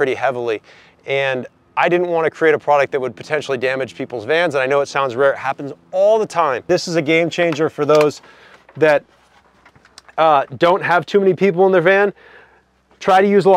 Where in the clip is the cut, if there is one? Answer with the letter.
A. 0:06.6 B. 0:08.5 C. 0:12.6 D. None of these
A